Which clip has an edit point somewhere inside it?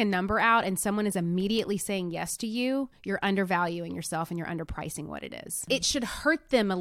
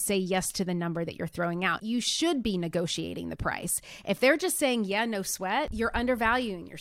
second; 2 cuts; at 1.8 s, 5.7 s

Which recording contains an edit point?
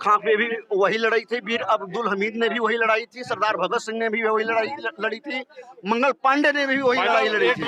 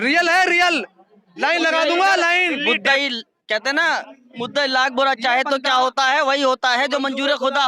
second; 1 cut; at 2.6 s

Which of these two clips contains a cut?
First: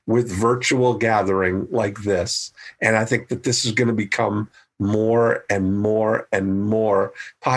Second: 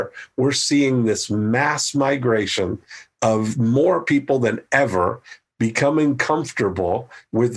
second; 1 cut; at 3.5 s

